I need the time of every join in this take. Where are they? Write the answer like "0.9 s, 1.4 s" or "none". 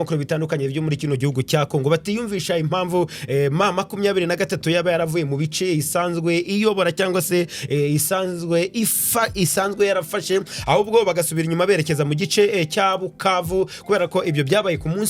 none

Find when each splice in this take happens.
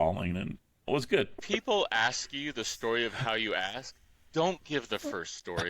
1.4 s

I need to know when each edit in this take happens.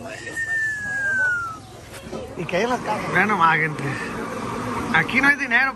2.9 s

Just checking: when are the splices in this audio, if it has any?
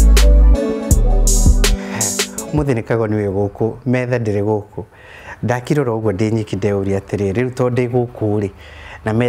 2.4 s

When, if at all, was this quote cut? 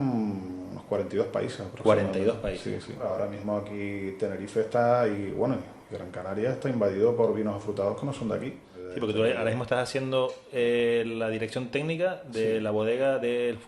3.1 s, 8.7 s

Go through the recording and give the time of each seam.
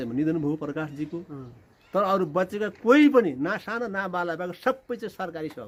none

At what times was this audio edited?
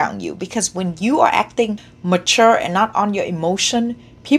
1.9 s

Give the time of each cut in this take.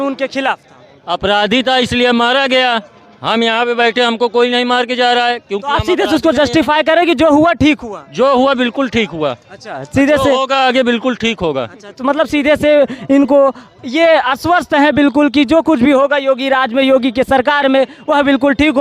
none

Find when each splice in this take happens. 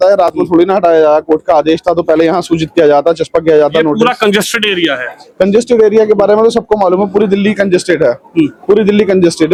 none

